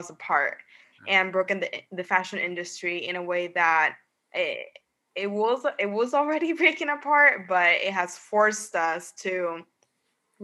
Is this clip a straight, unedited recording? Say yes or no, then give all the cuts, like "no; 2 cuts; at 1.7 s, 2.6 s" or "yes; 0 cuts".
yes; 0 cuts